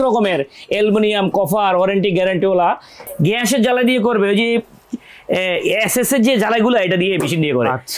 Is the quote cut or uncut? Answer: cut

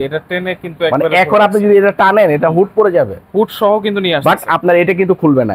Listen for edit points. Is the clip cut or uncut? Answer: uncut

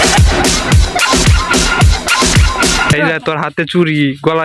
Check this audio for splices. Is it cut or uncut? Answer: cut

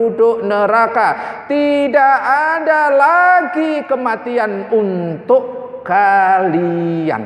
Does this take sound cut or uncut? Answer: uncut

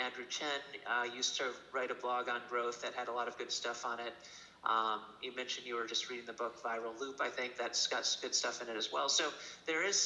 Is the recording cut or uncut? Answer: uncut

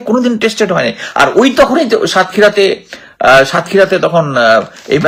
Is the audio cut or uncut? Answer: uncut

